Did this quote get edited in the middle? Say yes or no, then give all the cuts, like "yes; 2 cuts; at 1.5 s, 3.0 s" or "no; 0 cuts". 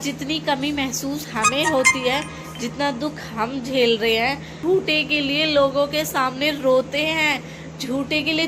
yes; 1 cut; at 4.5 s